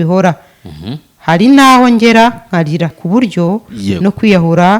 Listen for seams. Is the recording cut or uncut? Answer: cut